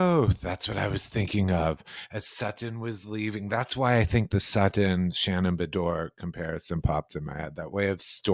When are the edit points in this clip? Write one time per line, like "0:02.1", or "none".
none